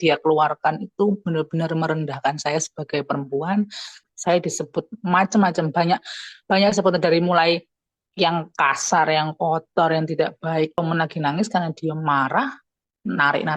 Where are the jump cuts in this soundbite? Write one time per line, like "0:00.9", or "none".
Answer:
0:04.1
0:10.8